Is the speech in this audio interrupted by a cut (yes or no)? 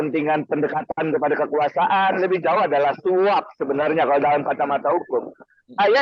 no